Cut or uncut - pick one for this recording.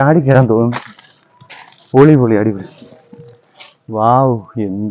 uncut